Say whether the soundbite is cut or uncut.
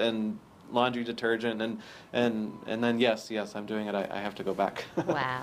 uncut